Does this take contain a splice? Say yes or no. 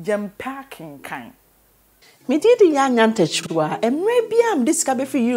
yes